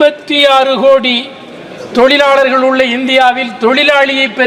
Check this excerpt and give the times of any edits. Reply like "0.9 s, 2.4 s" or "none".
none